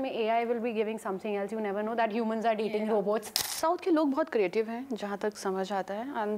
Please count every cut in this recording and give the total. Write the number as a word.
one